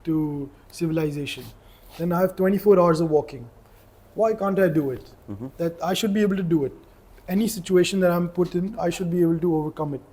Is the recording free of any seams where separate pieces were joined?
yes; 0 cuts

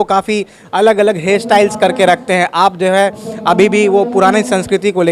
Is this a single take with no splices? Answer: yes; 0 cuts

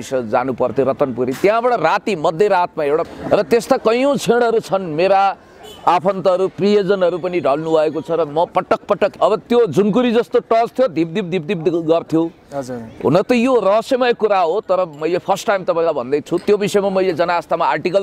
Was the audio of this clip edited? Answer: yes; 3 cuts; at 3.1 s, 9.2 s, 16.2 s

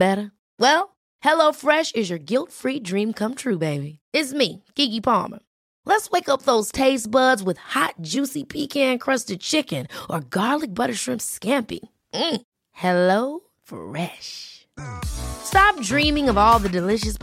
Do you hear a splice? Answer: no; 0 cuts

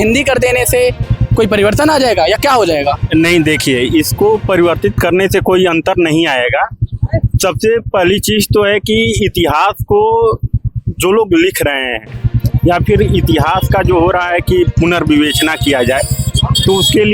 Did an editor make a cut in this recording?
no; 0 cuts

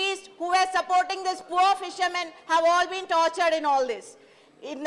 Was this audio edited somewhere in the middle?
yes; 2 cuts; at 1.9 s, 3.4 s

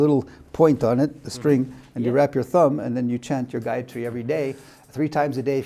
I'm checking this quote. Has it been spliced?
no; 0 cuts

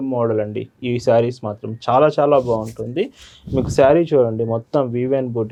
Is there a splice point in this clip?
no; 0 cuts

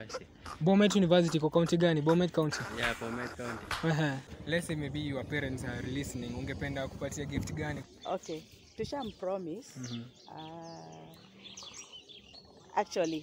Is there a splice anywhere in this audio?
yes; 2 cuts; at 4.3 s, 7.8 s

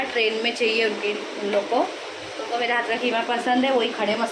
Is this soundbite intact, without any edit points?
yes; 0 cuts

